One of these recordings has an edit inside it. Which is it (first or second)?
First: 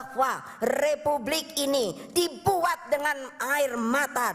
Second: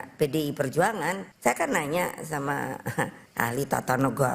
second